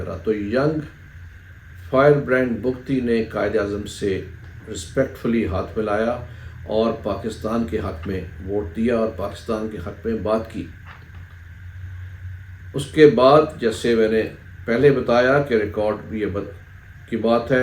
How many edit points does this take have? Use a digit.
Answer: 0